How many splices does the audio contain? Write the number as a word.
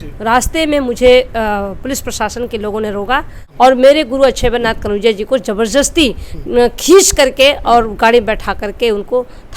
one